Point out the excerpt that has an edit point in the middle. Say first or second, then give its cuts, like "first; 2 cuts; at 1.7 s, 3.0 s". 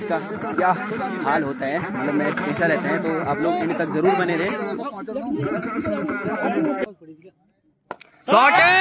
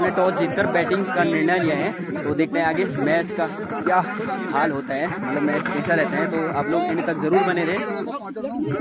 first; 1 cut; at 6.8 s